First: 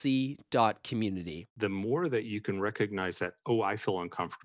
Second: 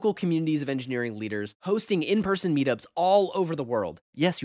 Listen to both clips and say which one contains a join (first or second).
first